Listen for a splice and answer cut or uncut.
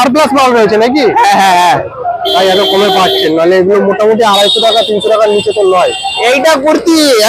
cut